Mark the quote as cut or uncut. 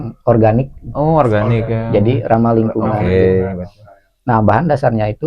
uncut